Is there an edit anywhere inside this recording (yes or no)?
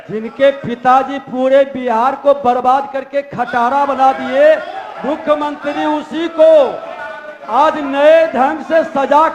no